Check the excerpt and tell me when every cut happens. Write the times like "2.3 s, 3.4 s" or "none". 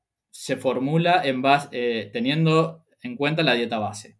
none